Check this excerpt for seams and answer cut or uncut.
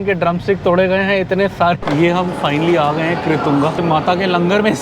cut